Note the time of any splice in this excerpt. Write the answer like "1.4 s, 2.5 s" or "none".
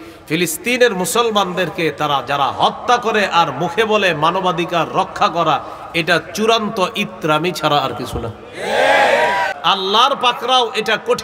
9.5 s